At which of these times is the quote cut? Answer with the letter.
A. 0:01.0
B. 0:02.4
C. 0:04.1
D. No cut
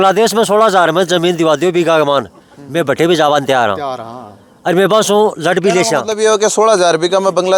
D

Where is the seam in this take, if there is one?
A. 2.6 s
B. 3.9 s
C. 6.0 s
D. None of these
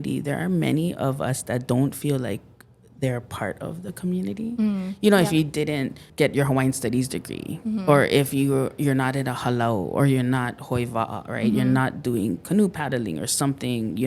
C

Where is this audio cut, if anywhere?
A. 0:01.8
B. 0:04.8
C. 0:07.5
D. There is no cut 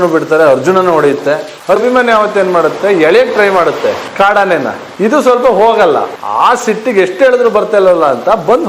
A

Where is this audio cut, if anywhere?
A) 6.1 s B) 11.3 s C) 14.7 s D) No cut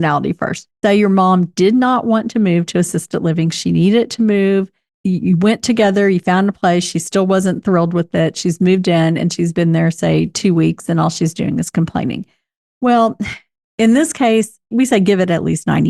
C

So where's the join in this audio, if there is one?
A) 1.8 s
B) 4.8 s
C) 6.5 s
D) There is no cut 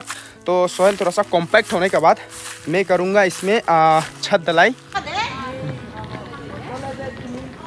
B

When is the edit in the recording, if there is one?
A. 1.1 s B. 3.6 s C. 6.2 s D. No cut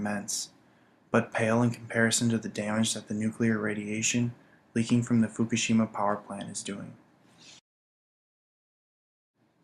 B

